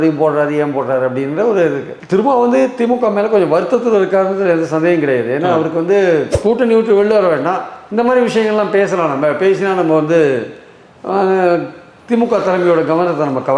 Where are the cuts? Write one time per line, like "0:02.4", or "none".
0:06.3